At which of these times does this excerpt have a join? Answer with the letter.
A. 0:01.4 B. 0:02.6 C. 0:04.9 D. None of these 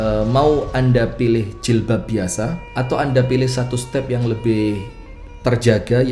B